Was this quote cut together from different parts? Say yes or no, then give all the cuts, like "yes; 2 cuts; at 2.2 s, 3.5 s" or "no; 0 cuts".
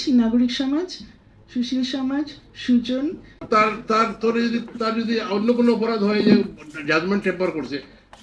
yes; 1 cut; at 3.3 s